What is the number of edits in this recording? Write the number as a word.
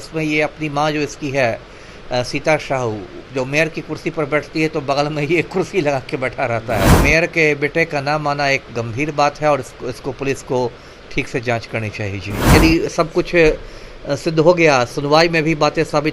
two